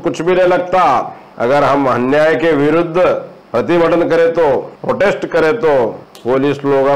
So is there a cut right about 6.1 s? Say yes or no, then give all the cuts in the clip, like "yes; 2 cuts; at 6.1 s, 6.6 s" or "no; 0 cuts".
yes; 4 cuts; at 1.2 s, 3.4 s, 4.7 s, 6.1 s